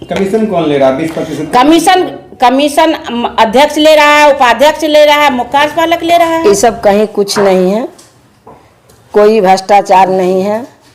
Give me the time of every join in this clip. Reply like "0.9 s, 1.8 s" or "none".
6.4 s